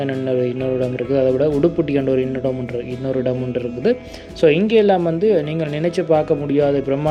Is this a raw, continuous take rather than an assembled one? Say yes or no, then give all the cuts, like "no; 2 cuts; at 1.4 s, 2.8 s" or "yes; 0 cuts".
yes; 0 cuts